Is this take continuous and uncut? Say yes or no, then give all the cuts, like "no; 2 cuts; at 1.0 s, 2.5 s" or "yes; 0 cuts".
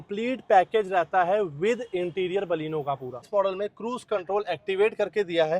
no; 1 cut; at 3.3 s